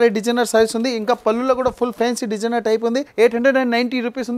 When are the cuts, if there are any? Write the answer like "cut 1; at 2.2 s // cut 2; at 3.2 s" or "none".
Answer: cut 1; at 3.1 s